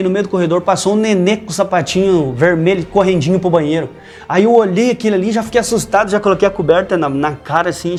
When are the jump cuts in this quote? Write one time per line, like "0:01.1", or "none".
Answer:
none